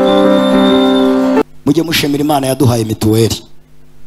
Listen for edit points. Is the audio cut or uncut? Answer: cut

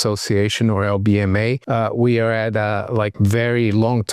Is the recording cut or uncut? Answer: cut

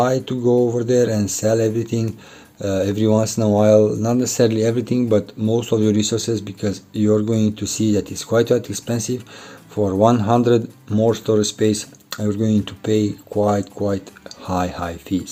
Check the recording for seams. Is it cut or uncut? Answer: uncut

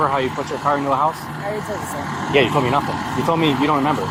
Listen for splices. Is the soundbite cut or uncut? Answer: uncut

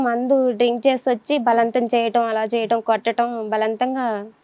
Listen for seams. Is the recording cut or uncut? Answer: uncut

